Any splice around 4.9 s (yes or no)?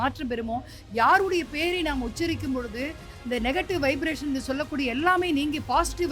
no